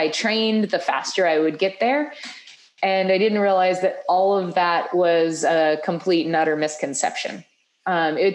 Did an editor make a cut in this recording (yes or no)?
no